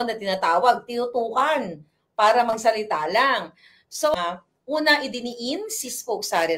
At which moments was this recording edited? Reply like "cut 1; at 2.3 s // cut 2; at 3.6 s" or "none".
cut 1; at 4.1 s